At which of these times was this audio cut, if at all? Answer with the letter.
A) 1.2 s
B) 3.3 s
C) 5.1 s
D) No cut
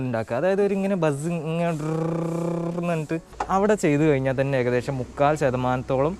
B